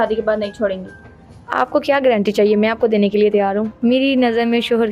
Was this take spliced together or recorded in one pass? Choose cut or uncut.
cut